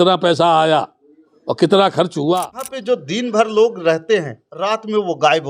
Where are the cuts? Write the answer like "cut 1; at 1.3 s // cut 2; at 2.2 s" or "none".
cut 1; at 2.7 s